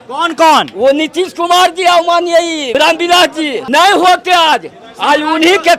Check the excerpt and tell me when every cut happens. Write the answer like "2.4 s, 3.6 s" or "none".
2.7 s, 3.6 s